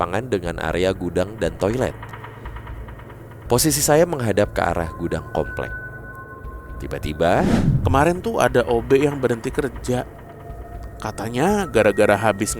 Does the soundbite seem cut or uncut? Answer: cut